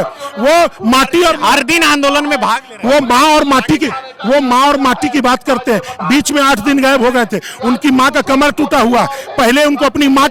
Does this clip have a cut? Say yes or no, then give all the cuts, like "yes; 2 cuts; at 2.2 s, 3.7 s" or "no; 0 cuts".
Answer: no; 0 cuts